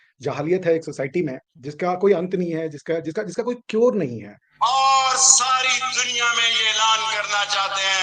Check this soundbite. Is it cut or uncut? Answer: cut